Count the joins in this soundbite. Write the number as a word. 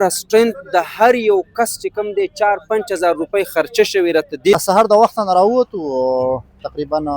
one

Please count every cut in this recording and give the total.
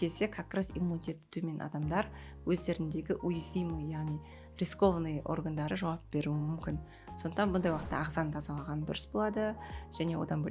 zero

